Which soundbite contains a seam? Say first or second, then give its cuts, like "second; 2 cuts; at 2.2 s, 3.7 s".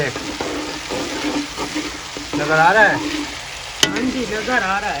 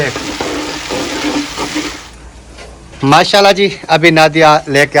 second; 1 cut; at 2.1 s